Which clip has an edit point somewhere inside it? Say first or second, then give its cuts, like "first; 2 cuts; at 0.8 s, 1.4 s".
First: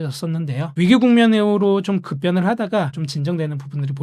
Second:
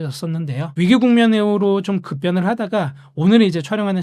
first; 1 cut; at 3.0 s